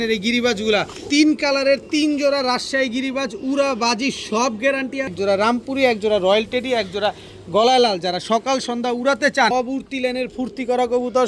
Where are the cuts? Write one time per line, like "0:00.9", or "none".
0:01.0
0:05.1
0:09.5